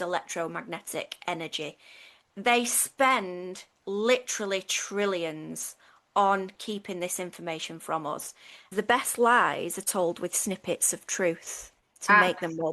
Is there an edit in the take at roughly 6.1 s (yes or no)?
no